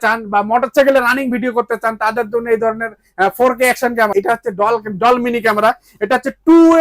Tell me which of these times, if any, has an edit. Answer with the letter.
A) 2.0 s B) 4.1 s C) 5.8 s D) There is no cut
B